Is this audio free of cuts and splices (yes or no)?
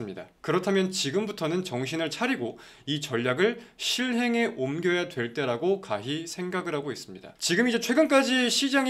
yes